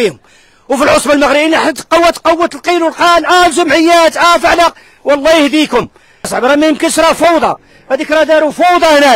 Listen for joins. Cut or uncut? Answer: cut